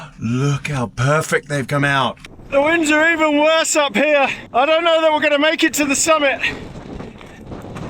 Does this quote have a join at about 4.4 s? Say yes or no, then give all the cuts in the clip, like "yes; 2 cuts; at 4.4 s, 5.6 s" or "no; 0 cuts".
yes; 2 cuts; at 2.3 s, 4.4 s